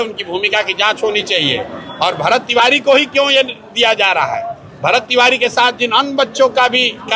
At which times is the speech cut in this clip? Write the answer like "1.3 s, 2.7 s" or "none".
none